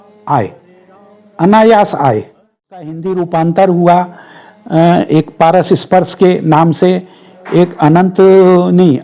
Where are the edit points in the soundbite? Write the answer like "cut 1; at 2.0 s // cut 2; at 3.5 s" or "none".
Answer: cut 1; at 3.0 s